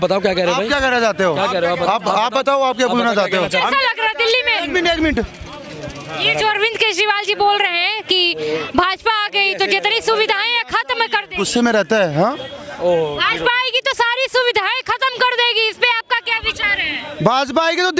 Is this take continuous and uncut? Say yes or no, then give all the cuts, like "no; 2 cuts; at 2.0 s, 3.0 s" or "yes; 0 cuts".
yes; 0 cuts